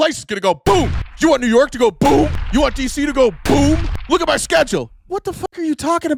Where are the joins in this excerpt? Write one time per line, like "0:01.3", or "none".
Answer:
none

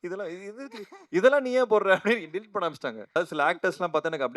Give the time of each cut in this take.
0:03.2

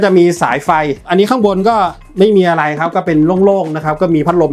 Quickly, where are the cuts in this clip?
none

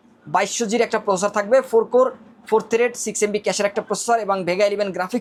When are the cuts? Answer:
none

